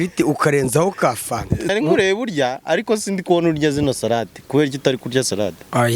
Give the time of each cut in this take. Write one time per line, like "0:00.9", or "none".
0:01.7